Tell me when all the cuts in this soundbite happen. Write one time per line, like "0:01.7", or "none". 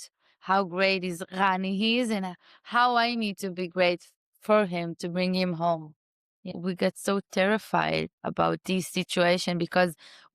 0:06.5